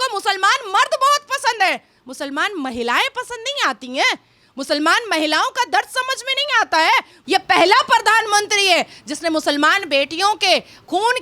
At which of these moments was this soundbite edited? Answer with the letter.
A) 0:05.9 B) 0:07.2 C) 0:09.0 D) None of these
B